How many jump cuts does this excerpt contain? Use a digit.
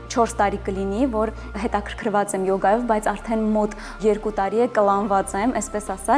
2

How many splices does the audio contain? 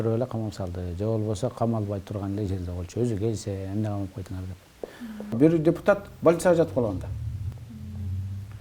1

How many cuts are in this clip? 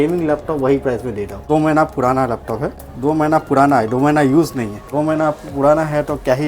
3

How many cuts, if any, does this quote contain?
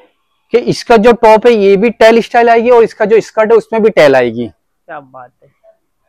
0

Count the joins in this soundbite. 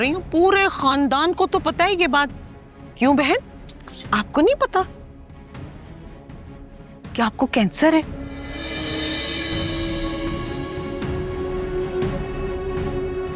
0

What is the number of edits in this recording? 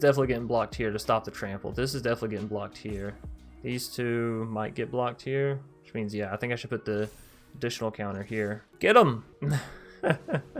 2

